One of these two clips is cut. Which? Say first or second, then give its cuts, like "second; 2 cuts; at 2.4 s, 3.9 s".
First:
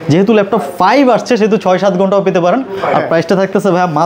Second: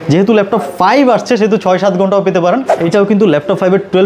second; 1 cut; at 2.7 s